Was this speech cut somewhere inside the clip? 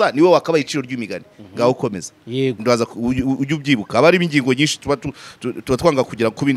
no; 0 cuts

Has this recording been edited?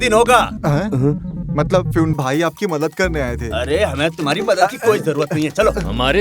yes; 1 cut; at 2.1 s

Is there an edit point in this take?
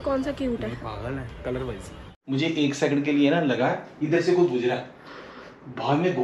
yes; 1 cut; at 2.0 s

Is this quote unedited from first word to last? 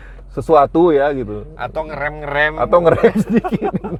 yes; 0 cuts

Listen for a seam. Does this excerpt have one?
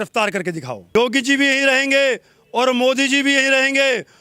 yes; 1 cut; at 0.9 s

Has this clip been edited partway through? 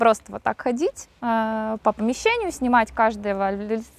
no; 0 cuts

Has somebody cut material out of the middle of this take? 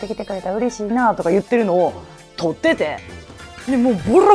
no; 0 cuts

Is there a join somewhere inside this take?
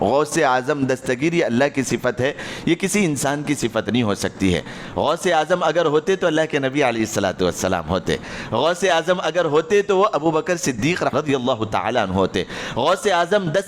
yes; 1 cut; at 11.1 s

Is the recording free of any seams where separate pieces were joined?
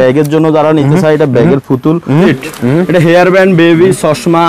no; 1 cut; at 2.3 s

